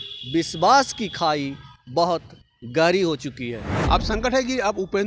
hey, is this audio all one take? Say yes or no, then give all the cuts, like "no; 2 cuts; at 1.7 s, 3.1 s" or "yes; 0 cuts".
no; 1 cut; at 3.7 s